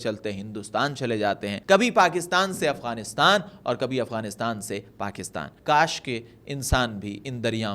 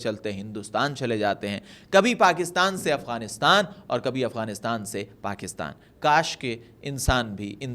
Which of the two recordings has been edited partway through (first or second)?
first